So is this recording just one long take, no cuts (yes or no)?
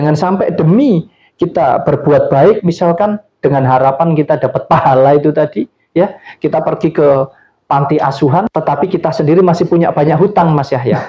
no